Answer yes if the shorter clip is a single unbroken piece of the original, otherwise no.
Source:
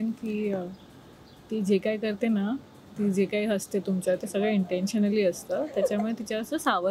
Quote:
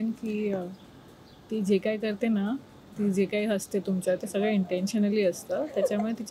yes